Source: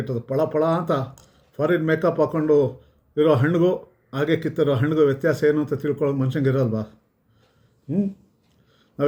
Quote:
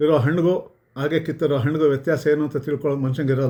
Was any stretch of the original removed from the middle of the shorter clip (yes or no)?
no